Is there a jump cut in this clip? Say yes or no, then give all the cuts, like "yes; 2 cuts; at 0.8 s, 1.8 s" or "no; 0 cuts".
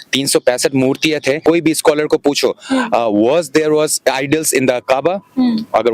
yes; 1 cut; at 1.4 s